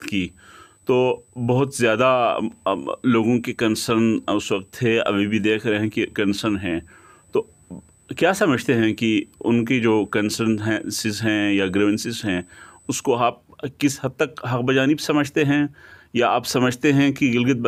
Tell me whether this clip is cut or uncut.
uncut